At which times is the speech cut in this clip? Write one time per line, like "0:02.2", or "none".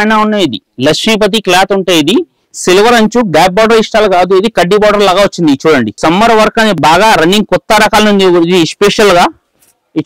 0:05.9